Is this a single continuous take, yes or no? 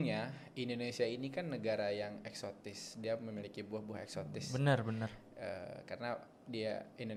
yes